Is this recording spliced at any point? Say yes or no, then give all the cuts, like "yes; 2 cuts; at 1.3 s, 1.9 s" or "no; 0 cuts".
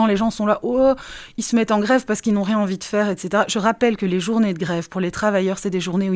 no; 0 cuts